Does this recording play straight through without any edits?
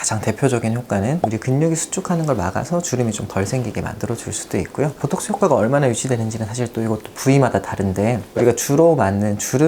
no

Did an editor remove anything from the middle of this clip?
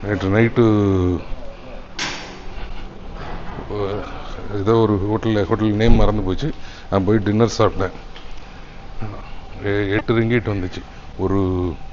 no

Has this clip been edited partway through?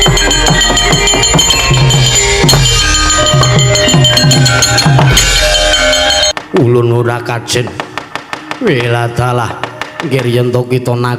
yes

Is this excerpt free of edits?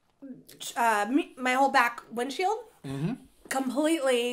yes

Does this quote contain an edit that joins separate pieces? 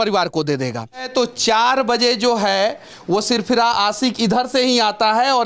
yes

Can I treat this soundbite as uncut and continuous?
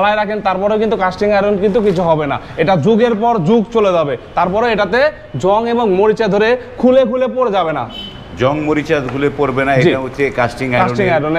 yes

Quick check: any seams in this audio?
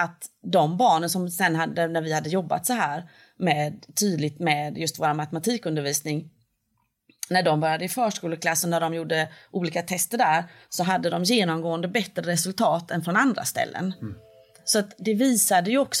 yes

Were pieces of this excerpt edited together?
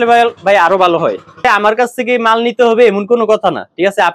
yes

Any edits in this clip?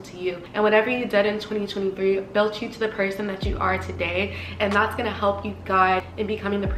no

